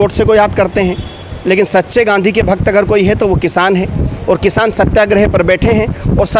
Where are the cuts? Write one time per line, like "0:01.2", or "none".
none